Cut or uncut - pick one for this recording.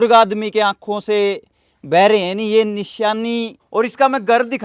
cut